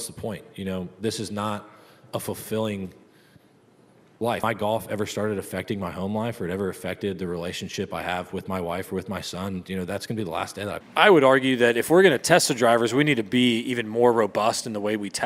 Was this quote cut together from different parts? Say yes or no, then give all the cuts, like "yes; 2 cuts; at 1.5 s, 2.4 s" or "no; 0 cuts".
yes; 2 cuts; at 4.4 s, 10.8 s